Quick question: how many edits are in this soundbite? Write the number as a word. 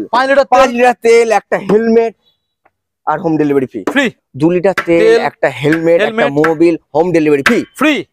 one